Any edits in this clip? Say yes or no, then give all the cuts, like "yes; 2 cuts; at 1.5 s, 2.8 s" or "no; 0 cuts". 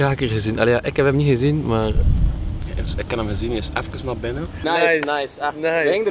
yes; 1 cut; at 4.5 s